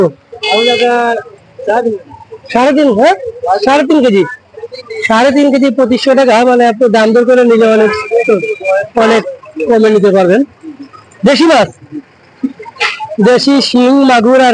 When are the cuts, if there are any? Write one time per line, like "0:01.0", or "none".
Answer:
none